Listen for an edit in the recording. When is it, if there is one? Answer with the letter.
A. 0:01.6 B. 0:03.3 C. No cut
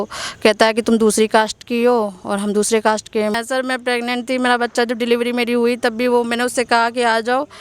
B